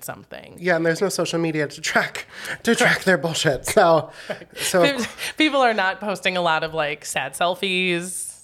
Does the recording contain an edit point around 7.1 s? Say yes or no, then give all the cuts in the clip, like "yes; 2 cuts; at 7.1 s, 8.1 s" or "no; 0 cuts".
no; 0 cuts